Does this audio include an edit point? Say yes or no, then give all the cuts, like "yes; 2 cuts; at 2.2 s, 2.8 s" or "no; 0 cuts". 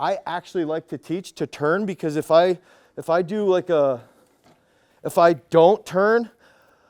no; 0 cuts